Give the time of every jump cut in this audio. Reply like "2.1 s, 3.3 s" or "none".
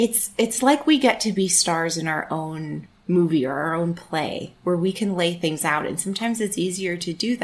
none